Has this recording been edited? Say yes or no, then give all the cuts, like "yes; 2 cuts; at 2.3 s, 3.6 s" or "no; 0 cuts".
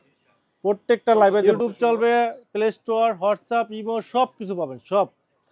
yes; 1 cut; at 1.4 s